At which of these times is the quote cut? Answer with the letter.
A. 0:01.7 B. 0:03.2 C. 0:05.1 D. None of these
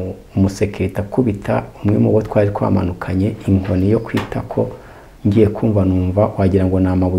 D